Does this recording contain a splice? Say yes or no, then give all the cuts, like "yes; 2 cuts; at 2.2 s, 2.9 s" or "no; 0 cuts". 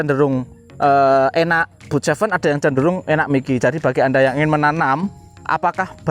yes; 1 cut; at 3.6 s